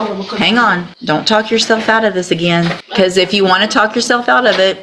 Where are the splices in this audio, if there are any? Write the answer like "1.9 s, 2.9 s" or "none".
0.9 s, 2.8 s